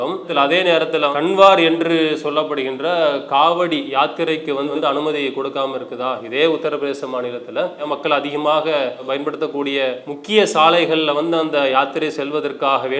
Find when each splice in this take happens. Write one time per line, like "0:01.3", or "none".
0:01.1
0:04.7
0:07.8
0:10.1